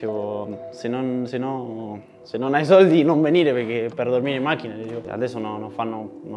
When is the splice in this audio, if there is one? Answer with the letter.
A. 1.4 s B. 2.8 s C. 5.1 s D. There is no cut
C